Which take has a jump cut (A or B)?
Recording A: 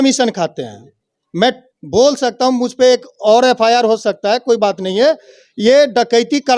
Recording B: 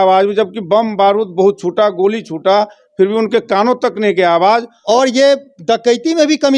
B